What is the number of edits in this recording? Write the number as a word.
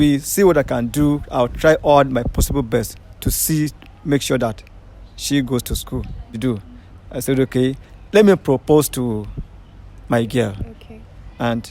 one